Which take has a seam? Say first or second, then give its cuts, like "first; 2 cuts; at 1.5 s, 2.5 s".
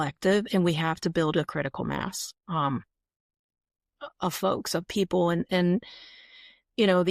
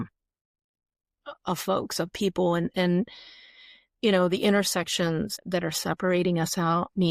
second; 1 cut; at 5.4 s